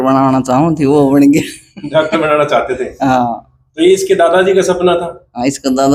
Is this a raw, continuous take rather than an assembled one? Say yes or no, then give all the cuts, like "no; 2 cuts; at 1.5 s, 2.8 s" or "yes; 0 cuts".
yes; 0 cuts